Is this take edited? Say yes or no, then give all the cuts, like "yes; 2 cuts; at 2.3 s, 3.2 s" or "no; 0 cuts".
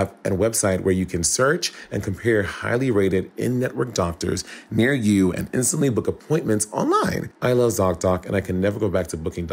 yes; 1 cut; at 7.3 s